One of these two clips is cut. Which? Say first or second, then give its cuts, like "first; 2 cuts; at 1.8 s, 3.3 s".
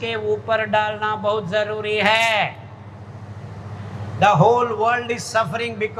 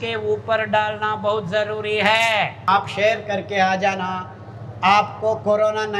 second; 1 cut; at 2.6 s